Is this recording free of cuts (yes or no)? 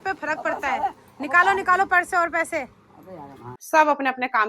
no